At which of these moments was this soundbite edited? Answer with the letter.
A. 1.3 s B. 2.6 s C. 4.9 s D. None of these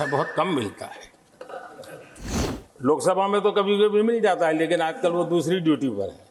B